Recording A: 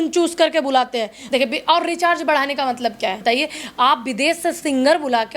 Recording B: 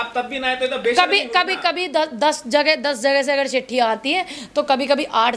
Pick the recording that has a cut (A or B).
A